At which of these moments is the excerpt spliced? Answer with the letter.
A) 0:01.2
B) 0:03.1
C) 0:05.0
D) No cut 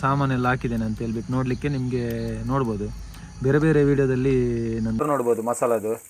C